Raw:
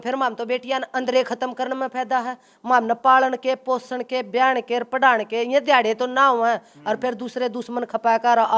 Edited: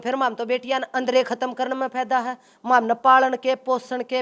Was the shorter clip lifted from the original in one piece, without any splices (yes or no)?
yes